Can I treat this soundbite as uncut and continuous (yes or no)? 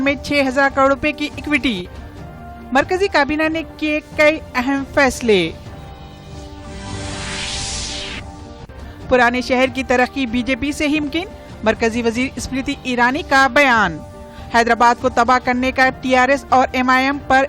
no